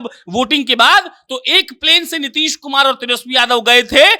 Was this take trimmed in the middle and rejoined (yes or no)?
no